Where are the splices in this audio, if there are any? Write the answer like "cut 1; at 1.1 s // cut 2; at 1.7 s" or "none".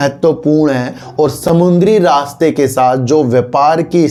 none